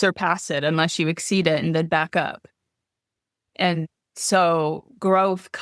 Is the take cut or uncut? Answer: uncut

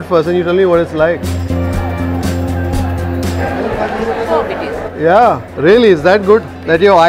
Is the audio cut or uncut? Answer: uncut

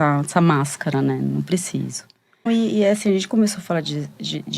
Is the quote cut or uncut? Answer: cut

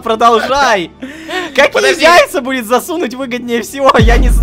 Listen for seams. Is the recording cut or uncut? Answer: uncut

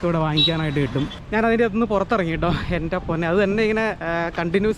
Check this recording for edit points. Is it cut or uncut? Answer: cut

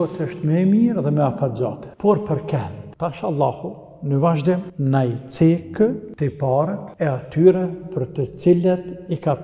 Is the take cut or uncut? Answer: cut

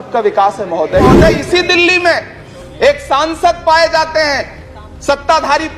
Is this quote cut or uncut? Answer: cut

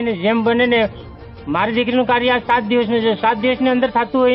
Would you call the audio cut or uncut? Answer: uncut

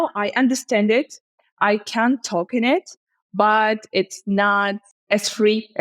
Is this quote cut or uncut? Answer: cut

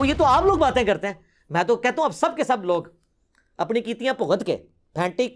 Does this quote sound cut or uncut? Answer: uncut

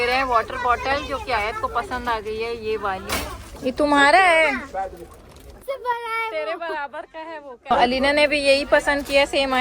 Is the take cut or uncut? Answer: cut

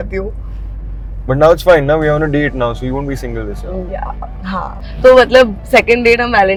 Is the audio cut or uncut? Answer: uncut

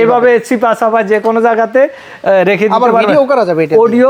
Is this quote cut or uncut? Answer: uncut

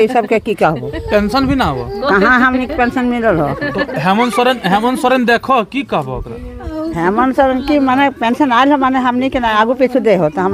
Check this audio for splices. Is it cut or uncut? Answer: uncut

